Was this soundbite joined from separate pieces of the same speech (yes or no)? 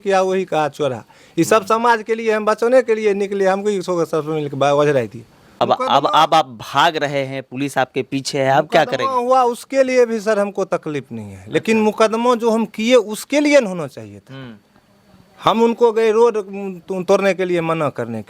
yes